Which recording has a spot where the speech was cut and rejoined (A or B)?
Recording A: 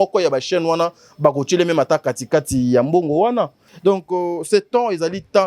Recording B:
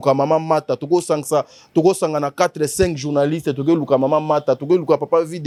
A